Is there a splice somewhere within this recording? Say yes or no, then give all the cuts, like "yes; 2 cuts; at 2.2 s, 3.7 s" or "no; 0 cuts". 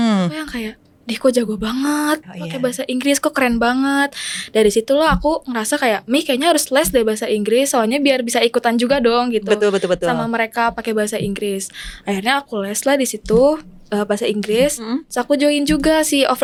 no; 0 cuts